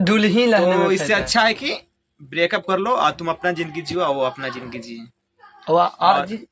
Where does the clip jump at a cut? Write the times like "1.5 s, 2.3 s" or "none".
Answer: none